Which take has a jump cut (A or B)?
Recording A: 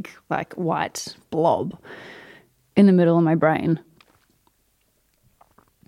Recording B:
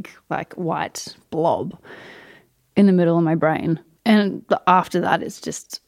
B